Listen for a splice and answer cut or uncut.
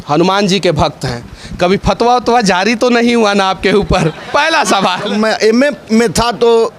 cut